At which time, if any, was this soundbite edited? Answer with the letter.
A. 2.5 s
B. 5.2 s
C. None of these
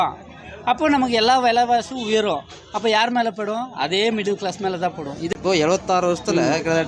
B